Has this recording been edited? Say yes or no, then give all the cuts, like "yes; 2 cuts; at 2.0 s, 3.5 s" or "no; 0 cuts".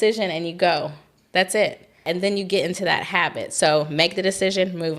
yes; 1 cut; at 2.0 s